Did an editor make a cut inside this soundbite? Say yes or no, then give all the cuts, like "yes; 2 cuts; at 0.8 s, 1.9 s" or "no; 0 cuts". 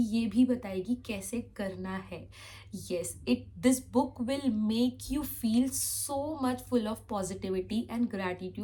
no; 0 cuts